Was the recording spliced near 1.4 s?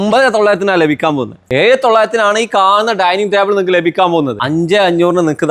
yes; 2 cuts; at 1.4 s, 4.3 s

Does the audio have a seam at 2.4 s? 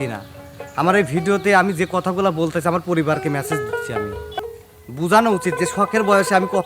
no; 1 cut; at 4.4 s

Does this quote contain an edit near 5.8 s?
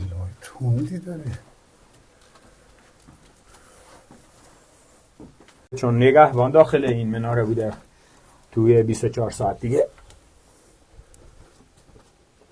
yes; 1 cut; at 5.8 s

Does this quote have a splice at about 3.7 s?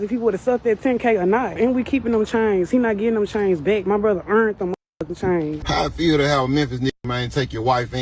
no; 2 cuts; at 1.6 s, 5.6 s

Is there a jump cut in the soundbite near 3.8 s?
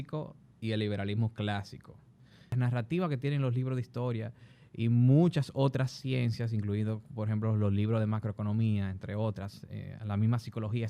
no; 1 cut; at 2.5 s

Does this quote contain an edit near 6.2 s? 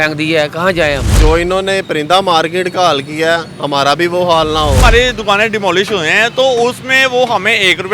no; 2 cuts; at 1.2 s, 4.8 s

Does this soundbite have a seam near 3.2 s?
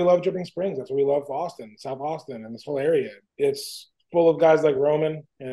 yes; 1 cut; at 3.2 s

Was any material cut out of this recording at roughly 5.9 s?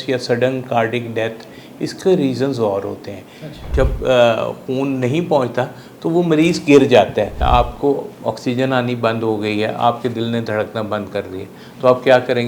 no; 2 cuts; at 3.6 s, 7.3 s

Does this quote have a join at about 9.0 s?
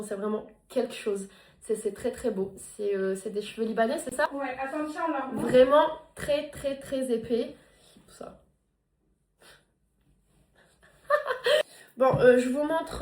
no; 1 cut; at 4.3 s

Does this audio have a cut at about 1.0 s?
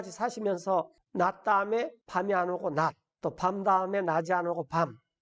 yes; 3 cuts; at 1.0 s, 2.0 s, 3.1 s

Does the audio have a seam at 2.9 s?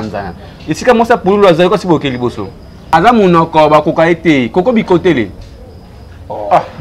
yes; 1 cut; at 2.9 s

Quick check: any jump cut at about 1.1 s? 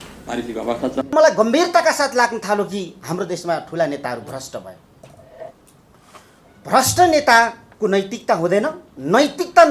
yes; 1 cut; at 1.1 s

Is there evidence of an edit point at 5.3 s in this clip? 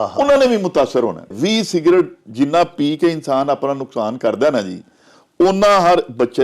no; 1 cut; at 1.3 s

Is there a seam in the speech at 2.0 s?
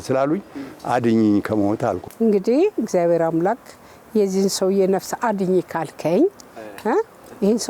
yes; 1 cut; at 2.0 s

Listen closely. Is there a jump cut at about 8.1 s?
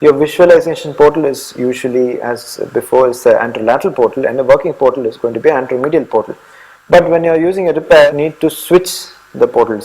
yes; 1 cut; at 8.1 s

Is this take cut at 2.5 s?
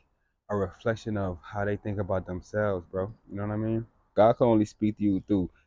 no; 1 cut; at 4.1 s

